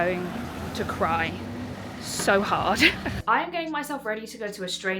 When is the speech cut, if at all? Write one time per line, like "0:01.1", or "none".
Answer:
0:03.1